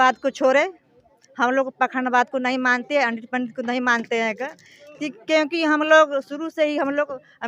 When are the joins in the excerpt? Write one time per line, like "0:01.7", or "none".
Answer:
none